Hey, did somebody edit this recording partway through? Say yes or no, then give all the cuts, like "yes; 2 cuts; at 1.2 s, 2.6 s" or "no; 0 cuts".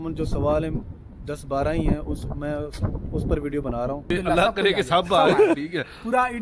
yes; 1 cut; at 4.1 s